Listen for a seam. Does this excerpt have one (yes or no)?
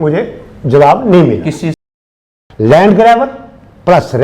yes